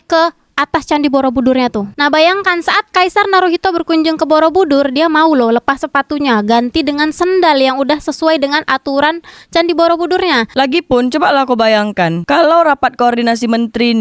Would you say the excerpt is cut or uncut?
cut